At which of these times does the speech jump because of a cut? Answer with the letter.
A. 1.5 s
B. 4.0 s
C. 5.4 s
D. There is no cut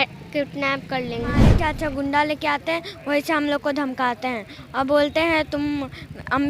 A